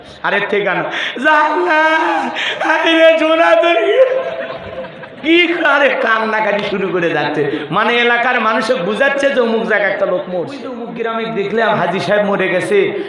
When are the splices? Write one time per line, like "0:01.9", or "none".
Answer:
0:10.8